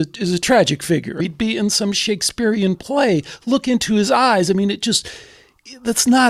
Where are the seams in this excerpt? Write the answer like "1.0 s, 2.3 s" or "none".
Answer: 1.2 s